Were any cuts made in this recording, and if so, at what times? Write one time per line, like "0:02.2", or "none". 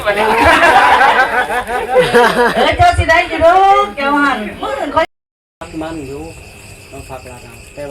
0:05.1